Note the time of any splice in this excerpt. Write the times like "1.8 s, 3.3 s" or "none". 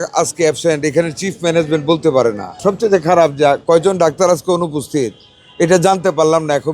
2.5 s

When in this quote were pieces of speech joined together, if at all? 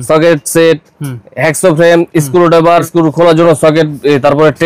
2.9 s

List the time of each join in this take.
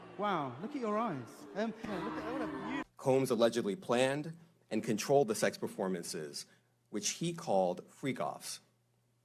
2.9 s

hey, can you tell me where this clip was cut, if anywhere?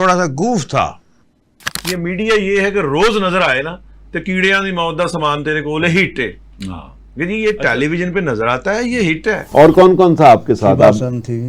1.8 s, 9.4 s

